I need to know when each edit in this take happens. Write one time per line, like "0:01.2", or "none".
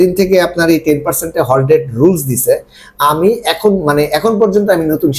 none